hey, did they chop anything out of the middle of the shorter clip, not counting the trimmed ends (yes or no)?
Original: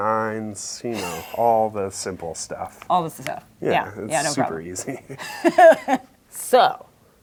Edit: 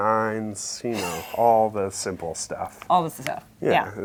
no